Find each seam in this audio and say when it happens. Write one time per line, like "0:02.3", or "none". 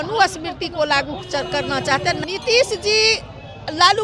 0:02.2